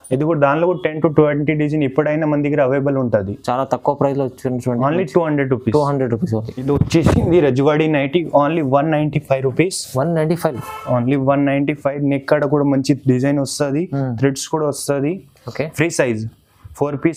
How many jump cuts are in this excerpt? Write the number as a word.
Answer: zero